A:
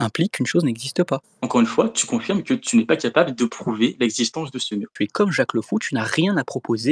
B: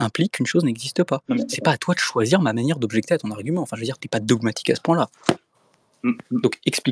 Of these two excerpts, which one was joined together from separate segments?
A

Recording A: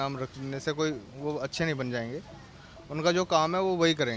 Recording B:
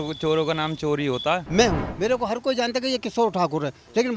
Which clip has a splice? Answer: B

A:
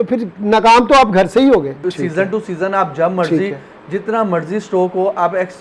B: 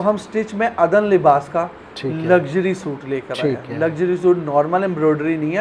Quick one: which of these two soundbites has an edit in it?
A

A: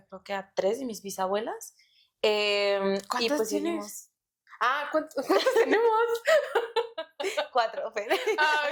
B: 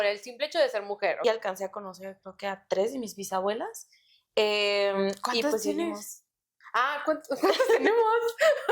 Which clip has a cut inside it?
B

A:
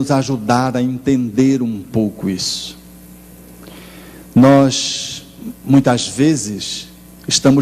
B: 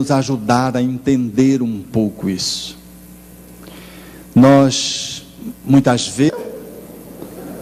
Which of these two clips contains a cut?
A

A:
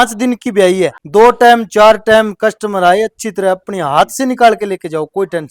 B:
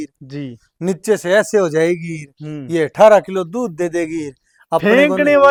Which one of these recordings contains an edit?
A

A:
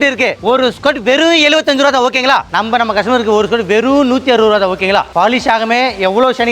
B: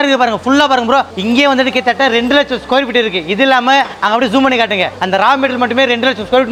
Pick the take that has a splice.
A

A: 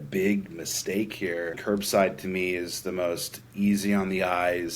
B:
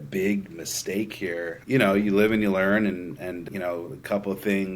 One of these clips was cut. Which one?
A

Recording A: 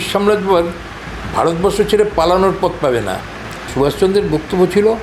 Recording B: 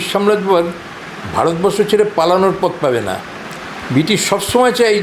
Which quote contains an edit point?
A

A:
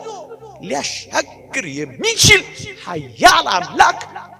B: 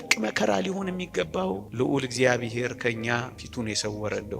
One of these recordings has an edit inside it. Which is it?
B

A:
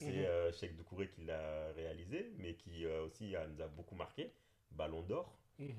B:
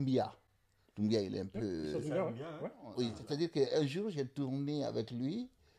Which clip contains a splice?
B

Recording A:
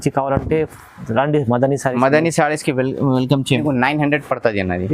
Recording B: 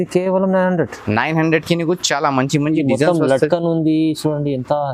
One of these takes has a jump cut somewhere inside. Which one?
A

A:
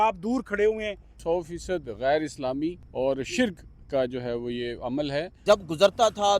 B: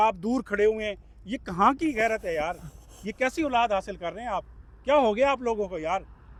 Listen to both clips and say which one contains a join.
A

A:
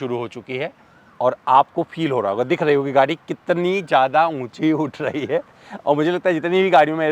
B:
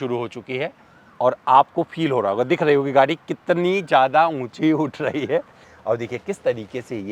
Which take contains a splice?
B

